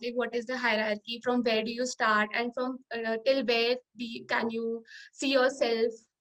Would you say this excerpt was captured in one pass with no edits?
yes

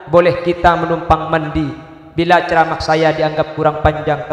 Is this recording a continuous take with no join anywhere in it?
yes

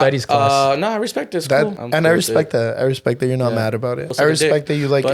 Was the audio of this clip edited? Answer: yes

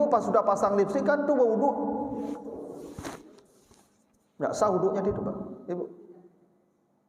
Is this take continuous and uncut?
yes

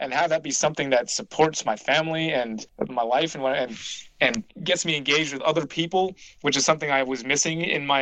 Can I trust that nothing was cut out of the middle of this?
no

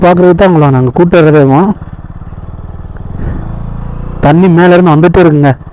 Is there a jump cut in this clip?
no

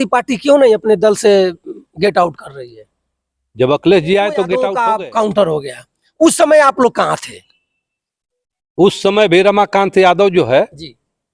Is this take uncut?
no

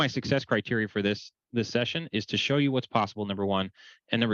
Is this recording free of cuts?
yes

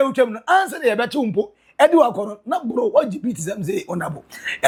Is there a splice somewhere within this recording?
no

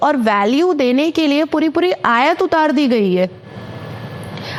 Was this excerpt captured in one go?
yes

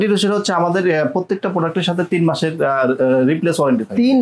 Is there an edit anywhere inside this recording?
no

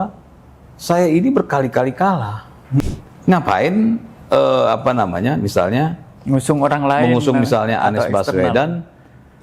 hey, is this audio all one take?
no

